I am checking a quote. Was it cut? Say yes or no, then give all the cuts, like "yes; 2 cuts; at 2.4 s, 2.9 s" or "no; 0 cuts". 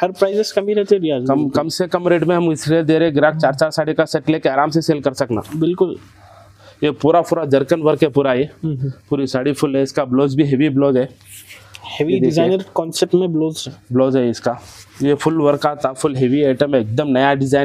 no; 0 cuts